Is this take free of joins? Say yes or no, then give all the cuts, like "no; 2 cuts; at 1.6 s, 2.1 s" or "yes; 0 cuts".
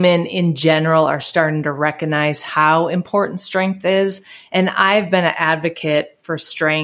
yes; 0 cuts